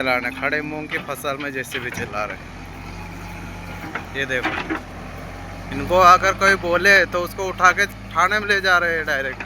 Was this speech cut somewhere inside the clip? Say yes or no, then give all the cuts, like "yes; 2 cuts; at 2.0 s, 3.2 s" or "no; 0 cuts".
no; 0 cuts